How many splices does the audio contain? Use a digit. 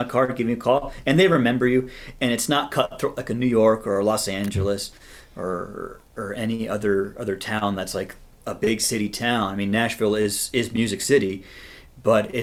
0